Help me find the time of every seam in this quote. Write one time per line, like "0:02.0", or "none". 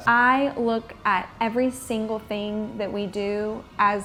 none